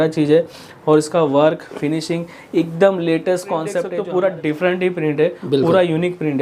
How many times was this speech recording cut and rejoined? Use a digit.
1